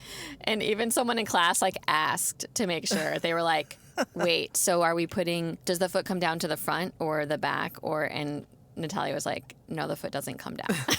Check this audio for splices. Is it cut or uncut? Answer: cut